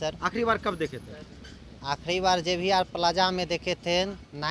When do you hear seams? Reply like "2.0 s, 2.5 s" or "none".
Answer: none